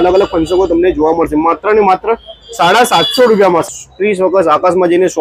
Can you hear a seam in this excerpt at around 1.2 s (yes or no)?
no